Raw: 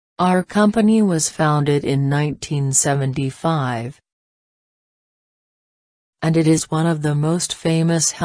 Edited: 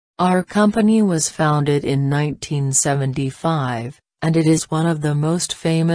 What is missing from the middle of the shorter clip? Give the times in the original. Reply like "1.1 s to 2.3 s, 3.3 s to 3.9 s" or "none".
4.0 s to 6.0 s